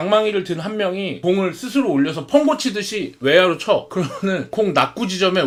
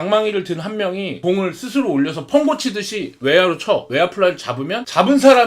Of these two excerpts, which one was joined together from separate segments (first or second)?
second